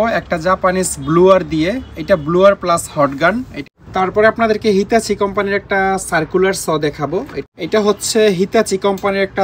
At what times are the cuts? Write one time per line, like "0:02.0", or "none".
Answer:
0:03.6
0:07.4